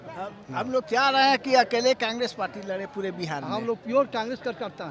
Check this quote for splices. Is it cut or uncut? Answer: uncut